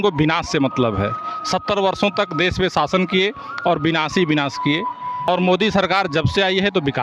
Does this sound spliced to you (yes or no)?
yes